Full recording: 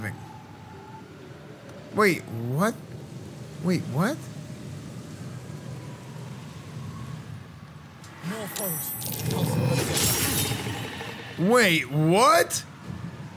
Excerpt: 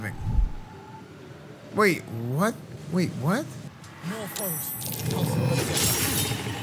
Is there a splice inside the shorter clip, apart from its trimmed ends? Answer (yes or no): yes